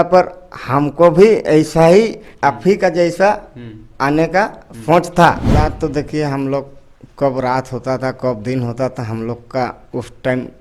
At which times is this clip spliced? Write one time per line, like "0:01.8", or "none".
0:05.4